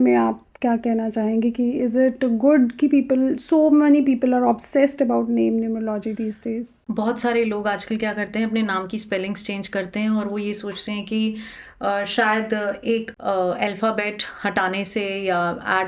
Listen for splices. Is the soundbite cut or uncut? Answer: cut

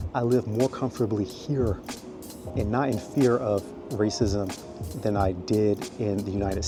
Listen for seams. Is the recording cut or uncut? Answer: uncut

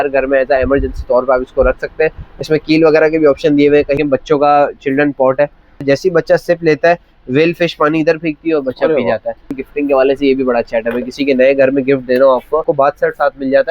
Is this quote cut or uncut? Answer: cut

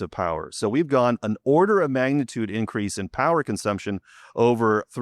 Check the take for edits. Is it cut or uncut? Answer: cut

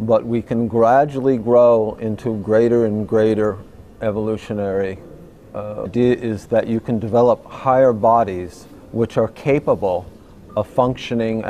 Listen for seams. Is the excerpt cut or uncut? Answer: uncut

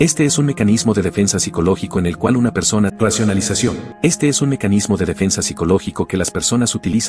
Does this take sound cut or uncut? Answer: cut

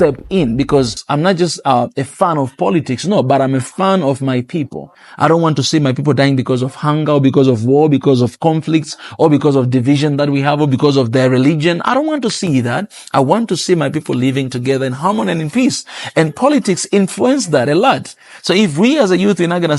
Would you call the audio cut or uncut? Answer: cut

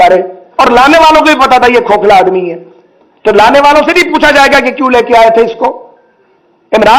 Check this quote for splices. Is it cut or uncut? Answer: uncut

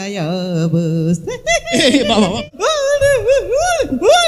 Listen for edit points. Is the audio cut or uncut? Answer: cut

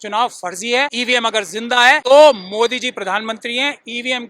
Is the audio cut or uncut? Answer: cut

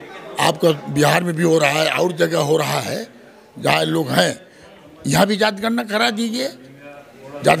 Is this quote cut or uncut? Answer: uncut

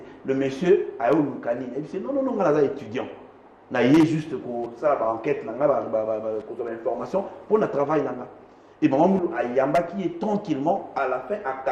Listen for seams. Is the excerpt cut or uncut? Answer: uncut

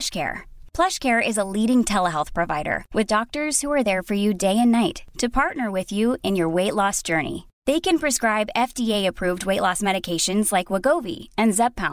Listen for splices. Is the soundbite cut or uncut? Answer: uncut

